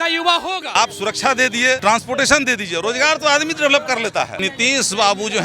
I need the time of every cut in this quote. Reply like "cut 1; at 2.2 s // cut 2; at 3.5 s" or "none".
cut 1; at 0.7 s // cut 2; at 1.8 s // cut 3; at 4.4 s